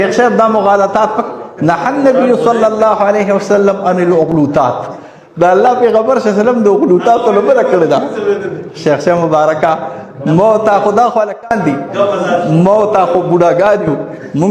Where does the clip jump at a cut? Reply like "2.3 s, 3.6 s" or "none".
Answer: none